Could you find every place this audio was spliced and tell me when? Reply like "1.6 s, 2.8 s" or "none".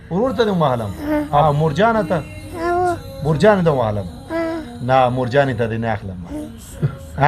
1.4 s